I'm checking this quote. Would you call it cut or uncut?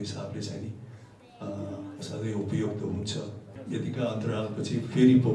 cut